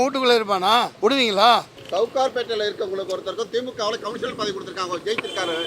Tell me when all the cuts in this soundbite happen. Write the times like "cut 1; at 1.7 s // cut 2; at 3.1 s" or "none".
cut 1; at 0.9 s // cut 2; at 1.8 s